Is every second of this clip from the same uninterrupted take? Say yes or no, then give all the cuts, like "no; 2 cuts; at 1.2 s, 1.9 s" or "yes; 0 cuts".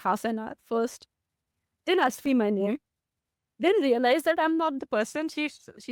yes; 0 cuts